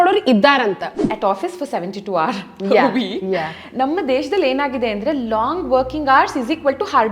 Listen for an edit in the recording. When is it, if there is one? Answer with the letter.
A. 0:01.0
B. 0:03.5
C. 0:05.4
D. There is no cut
A